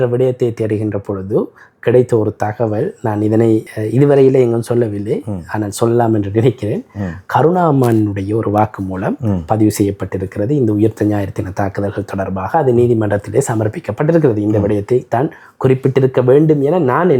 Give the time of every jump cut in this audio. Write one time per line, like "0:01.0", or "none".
none